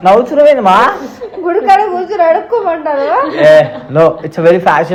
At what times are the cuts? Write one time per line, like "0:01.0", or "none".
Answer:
none